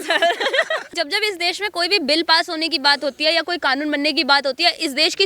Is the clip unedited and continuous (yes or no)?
no